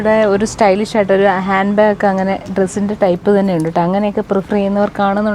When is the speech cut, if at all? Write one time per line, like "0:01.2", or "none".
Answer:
none